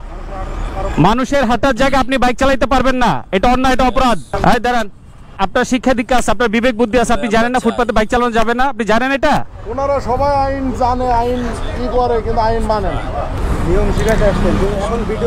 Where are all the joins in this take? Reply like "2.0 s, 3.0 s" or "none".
4.3 s, 5.3 s, 13.3 s